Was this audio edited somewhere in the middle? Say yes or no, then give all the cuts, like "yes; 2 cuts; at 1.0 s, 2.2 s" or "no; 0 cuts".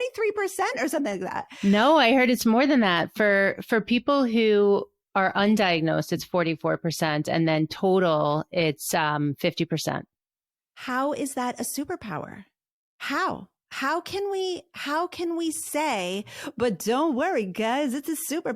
yes; 1 cut; at 1.4 s